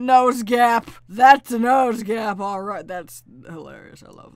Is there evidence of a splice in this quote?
no; 0 cuts

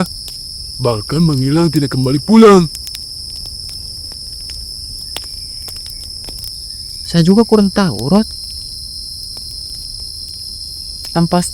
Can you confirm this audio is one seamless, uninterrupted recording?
no; 1 cut; at 6.5 s

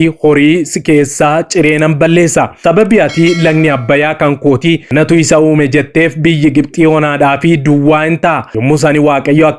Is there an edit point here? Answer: yes; 3 cuts; at 2.5 s, 4.8 s, 8.5 s

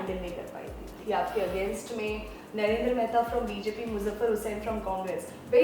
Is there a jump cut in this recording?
yes; 1 cut; at 1.0 s

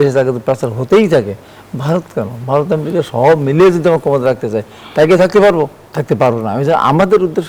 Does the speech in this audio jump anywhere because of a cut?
yes; 1 cut; at 5.9 s

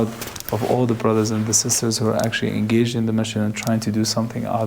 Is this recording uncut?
yes; 0 cuts

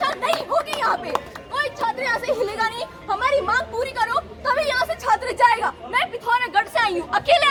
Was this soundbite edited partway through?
no; 0 cuts

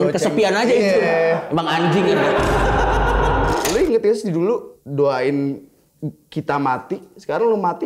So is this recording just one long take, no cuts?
no; 1 cut; at 3.6 s

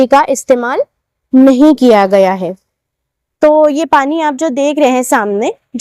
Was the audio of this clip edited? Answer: no; 0 cuts

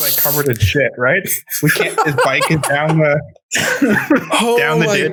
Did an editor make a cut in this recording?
no; 0 cuts

